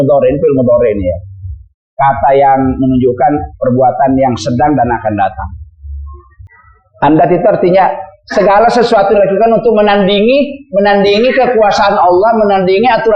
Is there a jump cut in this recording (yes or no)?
yes